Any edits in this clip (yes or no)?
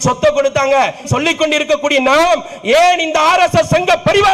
yes